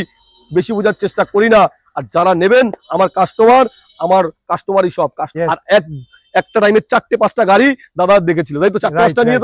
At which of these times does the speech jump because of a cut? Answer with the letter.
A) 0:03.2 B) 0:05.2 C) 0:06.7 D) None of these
B